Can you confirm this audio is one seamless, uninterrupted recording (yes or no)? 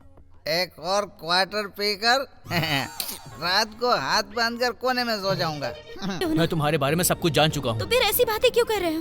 no